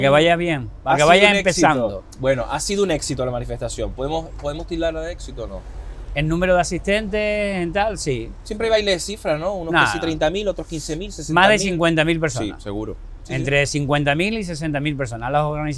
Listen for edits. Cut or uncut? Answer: uncut